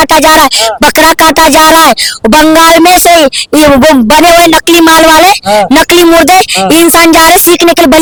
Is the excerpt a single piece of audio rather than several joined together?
yes; 0 cuts

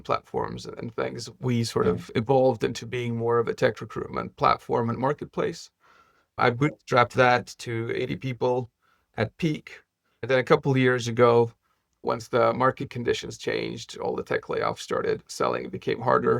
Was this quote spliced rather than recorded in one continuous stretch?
no; 0 cuts

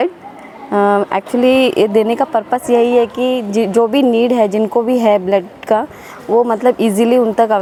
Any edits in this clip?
no; 0 cuts

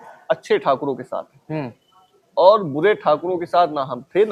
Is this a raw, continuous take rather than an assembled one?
yes; 0 cuts

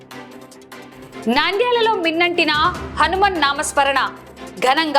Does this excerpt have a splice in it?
yes; 1 cut; at 0.9 s

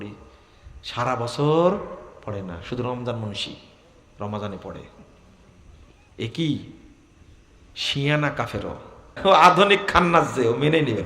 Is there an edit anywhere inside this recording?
yes; 1 cut; at 9.1 s

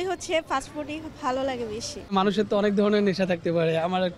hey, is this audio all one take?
no; 1 cut; at 2.0 s

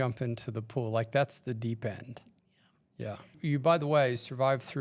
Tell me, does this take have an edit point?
yes; 1 cut; at 3.4 s

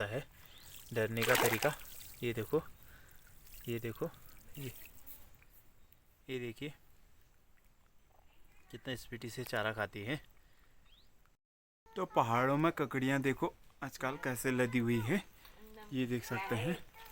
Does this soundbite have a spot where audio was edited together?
yes; 1 cut; at 11.4 s

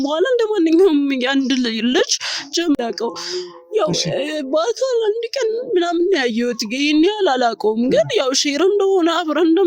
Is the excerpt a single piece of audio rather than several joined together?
no; 1 cut; at 2.8 s

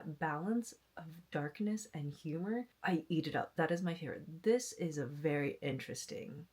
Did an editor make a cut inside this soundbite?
yes; 1 cut; at 2.7 s

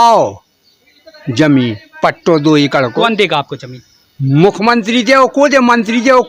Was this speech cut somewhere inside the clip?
no; 0 cuts

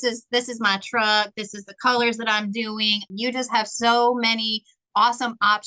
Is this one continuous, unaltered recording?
no; 1 cut; at 3.0 s

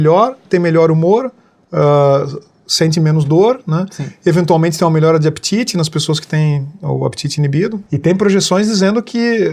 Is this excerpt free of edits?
no; 1 cut; at 7.9 s

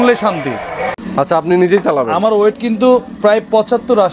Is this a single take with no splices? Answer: no; 1 cut; at 1.0 s

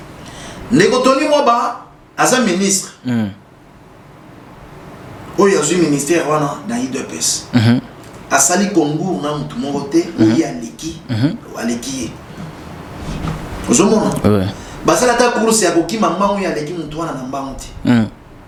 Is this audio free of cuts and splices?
yes; 0 cuts

